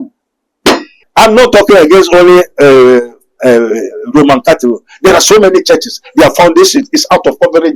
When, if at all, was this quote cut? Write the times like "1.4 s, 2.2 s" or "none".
1.0 s